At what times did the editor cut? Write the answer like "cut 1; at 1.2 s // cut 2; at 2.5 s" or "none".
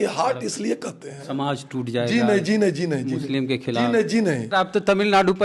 cut 1; at 4.5 s